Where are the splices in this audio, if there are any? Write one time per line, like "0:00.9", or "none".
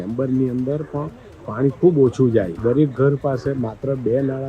0:02.5